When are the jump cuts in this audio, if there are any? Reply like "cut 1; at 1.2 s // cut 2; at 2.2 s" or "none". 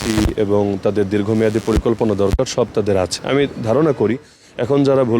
cut 1; at 3.2 s